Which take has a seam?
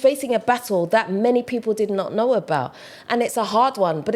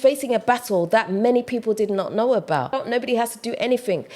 second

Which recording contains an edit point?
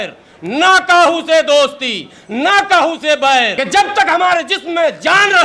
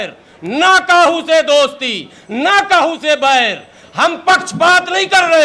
first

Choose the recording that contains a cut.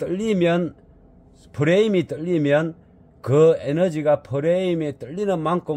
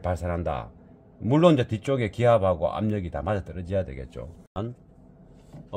second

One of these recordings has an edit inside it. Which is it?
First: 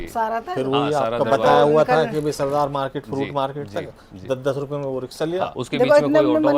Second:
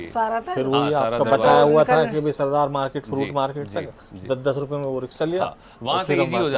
first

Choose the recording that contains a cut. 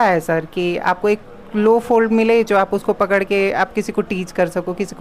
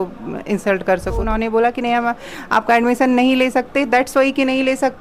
second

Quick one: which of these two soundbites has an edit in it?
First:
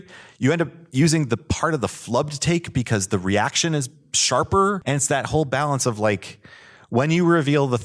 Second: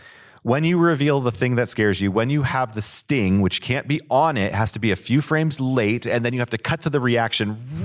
first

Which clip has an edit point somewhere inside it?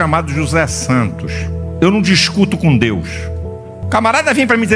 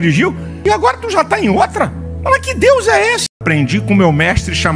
second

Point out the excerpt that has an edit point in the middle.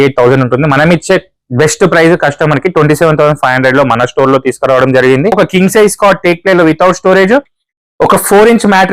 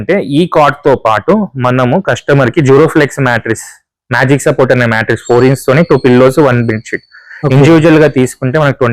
first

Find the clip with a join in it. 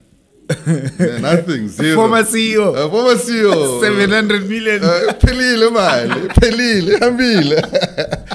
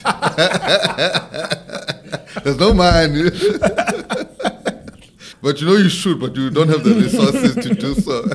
second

